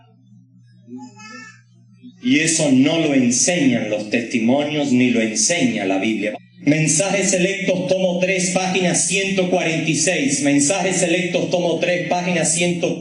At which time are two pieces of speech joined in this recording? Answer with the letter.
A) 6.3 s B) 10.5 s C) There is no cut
A